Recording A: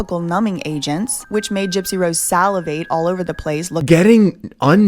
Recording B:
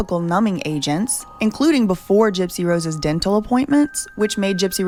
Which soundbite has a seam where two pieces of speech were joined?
A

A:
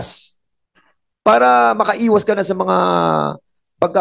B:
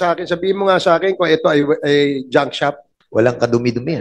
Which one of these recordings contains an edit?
B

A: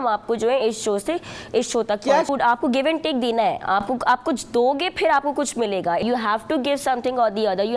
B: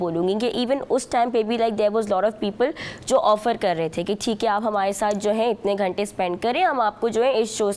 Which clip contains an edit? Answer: A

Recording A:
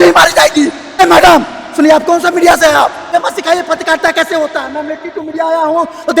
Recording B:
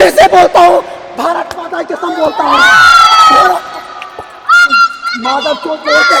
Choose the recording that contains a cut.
A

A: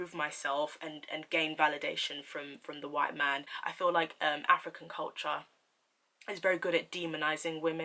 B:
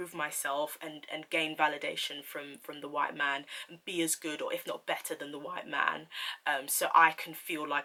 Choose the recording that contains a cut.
A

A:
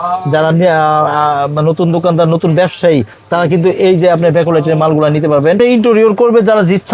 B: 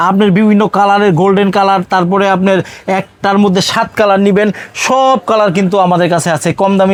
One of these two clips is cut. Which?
A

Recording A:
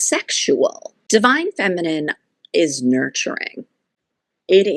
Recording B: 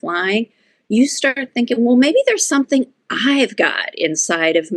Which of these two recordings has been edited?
A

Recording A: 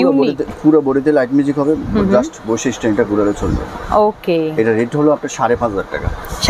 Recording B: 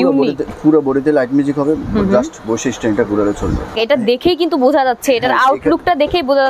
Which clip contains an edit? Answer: B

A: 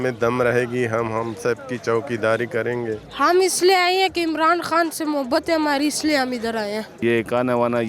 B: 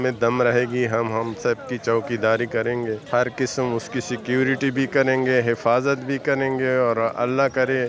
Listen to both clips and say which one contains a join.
A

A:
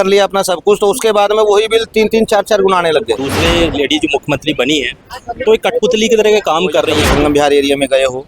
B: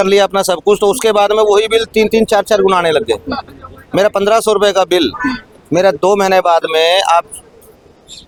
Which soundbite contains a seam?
A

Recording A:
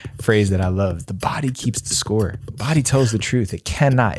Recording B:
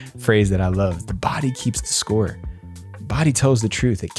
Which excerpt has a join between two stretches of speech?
A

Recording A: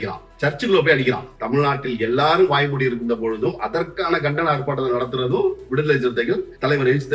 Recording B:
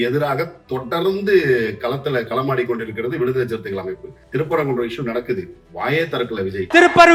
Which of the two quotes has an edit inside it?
A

